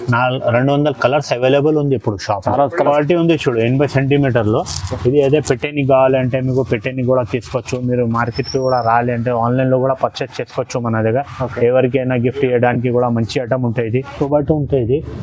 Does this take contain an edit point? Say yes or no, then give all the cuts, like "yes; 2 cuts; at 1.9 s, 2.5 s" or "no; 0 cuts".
yes; 2 cuts; at 2.8 s, 14.1 s